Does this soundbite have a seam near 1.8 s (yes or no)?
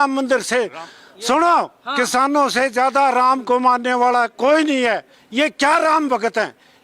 no